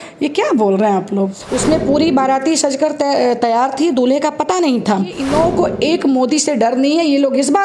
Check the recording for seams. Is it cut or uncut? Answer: cut